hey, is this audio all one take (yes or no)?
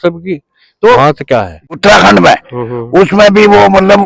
no